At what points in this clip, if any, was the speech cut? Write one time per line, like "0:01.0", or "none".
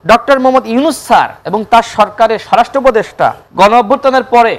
0:03.4